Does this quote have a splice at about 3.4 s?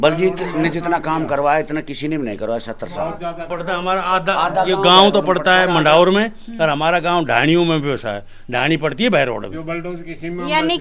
no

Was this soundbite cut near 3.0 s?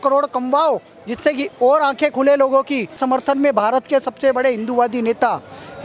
yes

